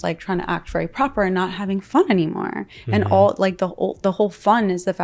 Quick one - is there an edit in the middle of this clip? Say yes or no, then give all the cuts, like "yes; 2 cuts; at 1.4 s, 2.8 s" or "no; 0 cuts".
no; 0 cuts